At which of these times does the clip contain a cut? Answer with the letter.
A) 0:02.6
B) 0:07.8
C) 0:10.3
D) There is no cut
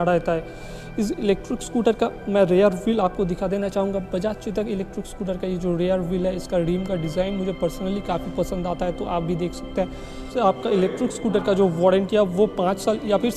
C